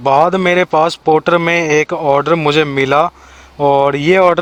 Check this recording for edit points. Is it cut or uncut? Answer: uncut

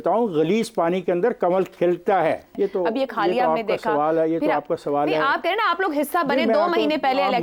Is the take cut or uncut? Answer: cut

